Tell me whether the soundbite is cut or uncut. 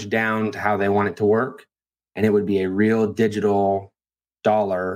uncut